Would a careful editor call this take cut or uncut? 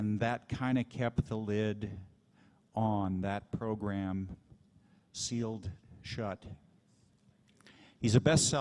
uncut